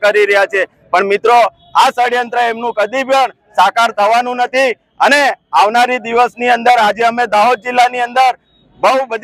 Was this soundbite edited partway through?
no; 0 cuts

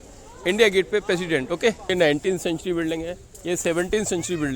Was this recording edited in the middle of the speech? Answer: yes; 1 cut; at 1.9 s

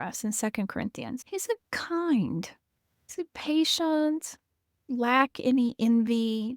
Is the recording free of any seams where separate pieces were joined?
no; 1 cut; at 1.2 s

